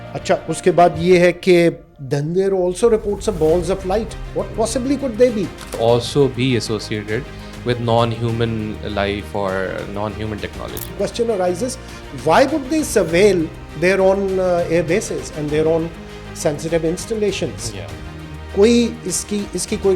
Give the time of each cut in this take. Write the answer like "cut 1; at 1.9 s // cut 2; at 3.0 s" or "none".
cut 1; at 1.9 s // cut 2; at 5.8 s // cut 3; at 10.9 s // cut 4; at 13.6 s